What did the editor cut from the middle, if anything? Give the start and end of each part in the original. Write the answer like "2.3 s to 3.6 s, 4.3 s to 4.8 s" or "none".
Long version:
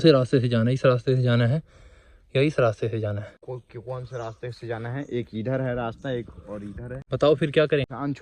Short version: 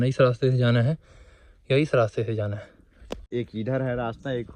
3.9 s to 5.0 s